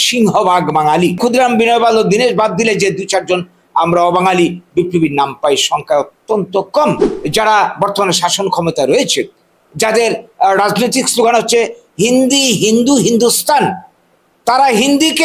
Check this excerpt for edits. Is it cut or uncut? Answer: cut